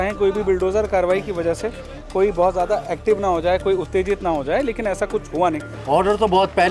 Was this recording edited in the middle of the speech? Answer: yes; 1 cut; at 5.7 s

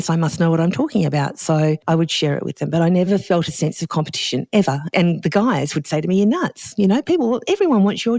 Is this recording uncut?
no; 3 cuts; at 1.8 s, 3.1 s, 4.9 s

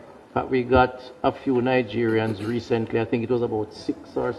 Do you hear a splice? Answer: no; 0 cuts

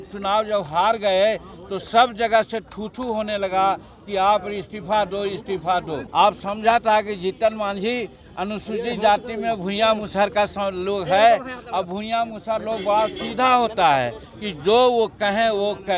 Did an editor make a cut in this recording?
yes; 2 cuts; at 6.0 s, 14.3 s

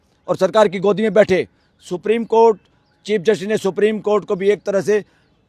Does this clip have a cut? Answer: no; 0 cuts

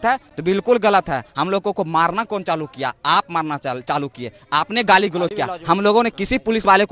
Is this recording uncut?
yes; 0 cuts

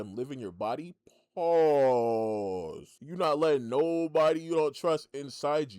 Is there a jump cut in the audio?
yes; 1 cut; at 2.9 s

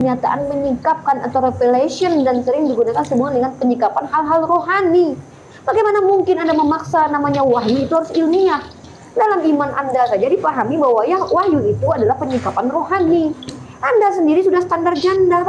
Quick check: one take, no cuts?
yes; 0 cuts

